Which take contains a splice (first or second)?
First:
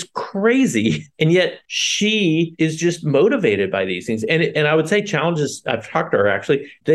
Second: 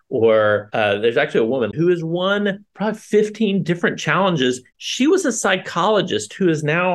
second